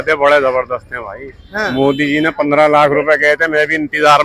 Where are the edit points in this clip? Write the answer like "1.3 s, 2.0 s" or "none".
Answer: none